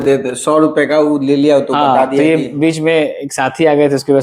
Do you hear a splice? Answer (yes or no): no